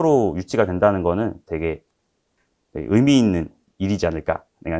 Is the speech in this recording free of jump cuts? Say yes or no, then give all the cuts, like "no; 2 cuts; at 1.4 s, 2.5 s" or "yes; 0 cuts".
no; 1 cut; at 3.7 s